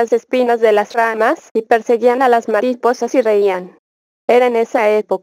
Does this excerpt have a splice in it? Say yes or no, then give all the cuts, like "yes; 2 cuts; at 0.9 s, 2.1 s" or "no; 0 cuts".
no; 0 cuts